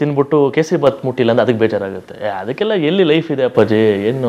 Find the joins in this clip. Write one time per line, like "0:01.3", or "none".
none

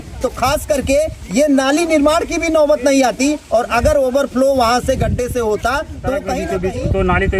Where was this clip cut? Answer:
0:06.4

